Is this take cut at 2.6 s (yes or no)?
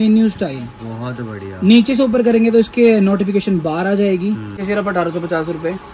no